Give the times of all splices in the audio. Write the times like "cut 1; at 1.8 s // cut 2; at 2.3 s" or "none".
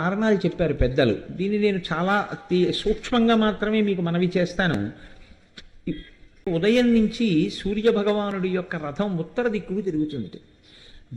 cut 1; at 6.5 s